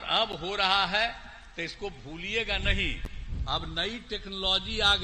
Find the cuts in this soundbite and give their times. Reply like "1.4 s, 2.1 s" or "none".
none